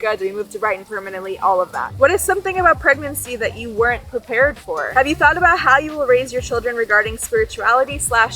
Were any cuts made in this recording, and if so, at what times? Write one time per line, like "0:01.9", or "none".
0:01.9
0:04.9